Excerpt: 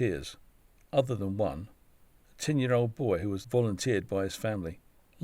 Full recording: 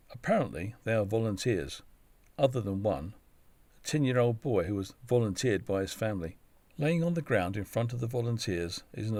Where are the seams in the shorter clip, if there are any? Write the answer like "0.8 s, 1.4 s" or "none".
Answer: 3.4 s